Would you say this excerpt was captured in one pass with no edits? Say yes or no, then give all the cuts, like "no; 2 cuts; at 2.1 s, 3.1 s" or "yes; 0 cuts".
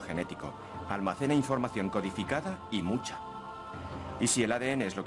yes; 0 cuts